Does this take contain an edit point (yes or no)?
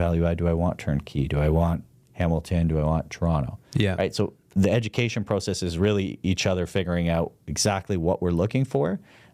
no